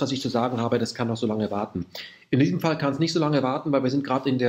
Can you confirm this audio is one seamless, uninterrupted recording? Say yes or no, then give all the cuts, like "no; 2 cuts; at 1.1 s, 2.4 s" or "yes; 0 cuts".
no; 1 cut; at 2.8 s